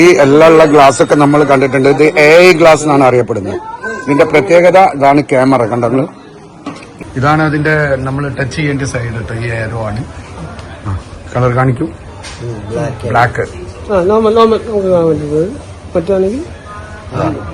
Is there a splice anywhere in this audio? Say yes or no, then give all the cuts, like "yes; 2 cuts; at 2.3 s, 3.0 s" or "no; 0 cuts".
yes; 1 cut; at 6.8 s